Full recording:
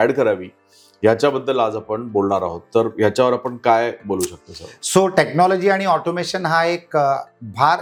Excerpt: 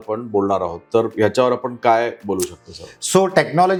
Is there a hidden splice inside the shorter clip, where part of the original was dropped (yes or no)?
no